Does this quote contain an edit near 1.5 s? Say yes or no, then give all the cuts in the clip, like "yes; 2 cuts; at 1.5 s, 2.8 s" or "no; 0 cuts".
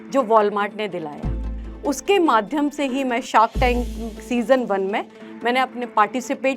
yes; 1 cut; at 1.5 s